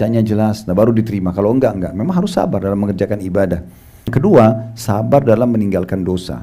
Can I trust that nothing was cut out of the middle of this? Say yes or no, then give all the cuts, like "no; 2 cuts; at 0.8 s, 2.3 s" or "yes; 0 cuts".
no; 1 cut; at 4.1 s